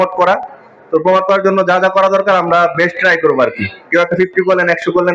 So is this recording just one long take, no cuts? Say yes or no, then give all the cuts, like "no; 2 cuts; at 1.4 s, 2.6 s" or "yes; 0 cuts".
yes; 0 cuts